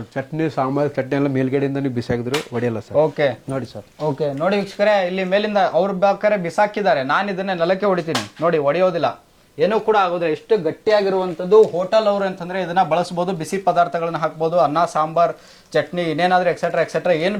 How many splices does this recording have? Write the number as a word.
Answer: zero